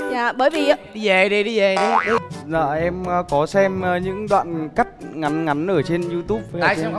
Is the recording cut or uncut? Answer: cut